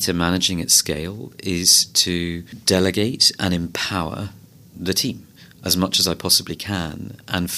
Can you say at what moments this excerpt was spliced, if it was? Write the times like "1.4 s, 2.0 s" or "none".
2.5 s